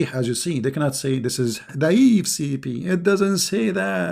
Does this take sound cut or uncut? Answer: cut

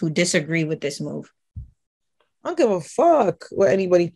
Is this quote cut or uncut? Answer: uncut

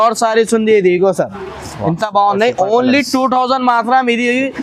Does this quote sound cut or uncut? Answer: uncut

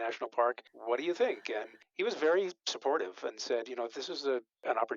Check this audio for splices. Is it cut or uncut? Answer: uncut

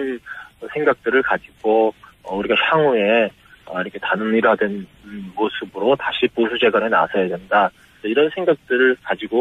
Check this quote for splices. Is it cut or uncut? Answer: cut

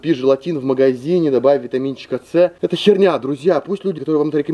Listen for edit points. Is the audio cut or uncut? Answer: uncut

